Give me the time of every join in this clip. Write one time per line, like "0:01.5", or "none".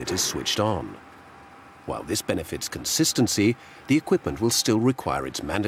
none